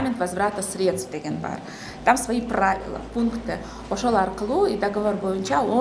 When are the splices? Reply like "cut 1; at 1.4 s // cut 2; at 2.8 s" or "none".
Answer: none